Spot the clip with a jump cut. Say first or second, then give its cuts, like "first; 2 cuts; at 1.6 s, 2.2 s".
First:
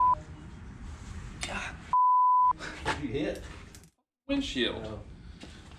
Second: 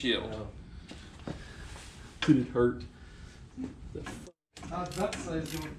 first; 1 cut; at 2.6 s